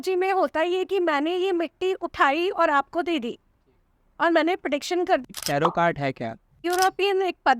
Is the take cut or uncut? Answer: cut